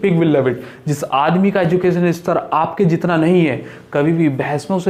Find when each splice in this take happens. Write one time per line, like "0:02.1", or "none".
none